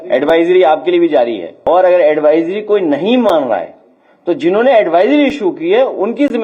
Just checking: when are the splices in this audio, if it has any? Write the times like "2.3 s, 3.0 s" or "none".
1.5 s